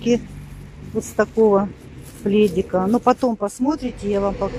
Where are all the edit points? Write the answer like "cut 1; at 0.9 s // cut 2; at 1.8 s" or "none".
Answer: none